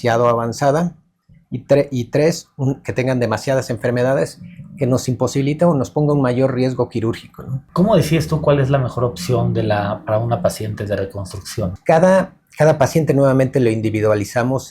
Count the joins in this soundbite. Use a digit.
2